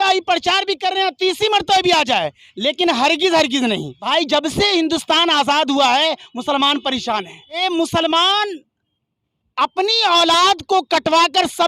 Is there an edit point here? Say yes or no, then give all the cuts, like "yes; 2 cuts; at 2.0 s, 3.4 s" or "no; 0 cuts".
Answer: yes; 2 cuts; at 3.9 s, 7.6 s